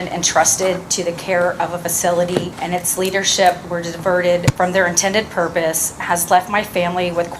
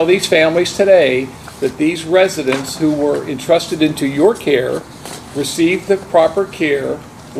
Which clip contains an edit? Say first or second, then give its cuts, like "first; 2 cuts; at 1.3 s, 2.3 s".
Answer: first; 2 cuts; at 2.6 s, 4.5 s